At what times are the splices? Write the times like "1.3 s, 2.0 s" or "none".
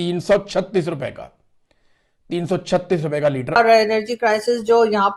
3.6 s